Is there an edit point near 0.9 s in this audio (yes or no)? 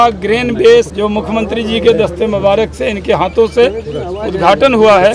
yes